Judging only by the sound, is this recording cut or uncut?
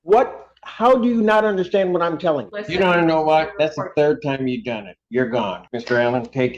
cut